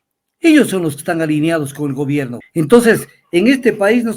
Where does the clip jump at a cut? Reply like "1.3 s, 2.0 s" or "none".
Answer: 2.4 s